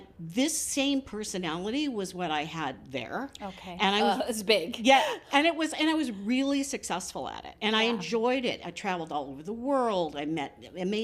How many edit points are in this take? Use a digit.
0